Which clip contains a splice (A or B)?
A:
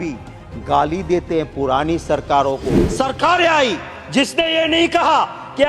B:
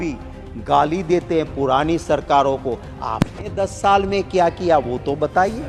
A